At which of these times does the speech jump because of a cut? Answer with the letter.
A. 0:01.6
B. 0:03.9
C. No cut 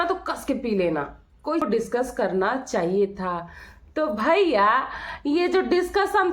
A